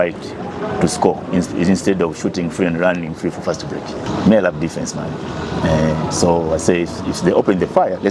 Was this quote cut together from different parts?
yes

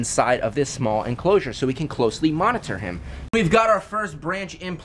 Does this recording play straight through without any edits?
no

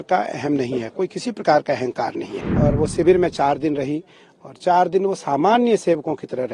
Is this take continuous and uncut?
no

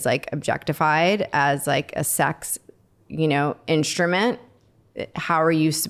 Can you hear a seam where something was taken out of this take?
no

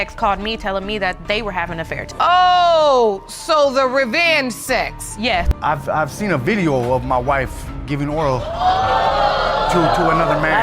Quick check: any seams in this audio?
yes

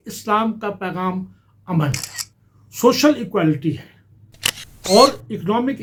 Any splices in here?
no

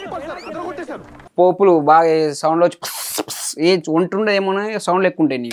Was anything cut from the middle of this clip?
yes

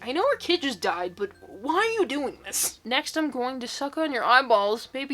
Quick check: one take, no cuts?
no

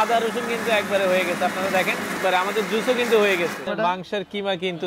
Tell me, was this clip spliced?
yes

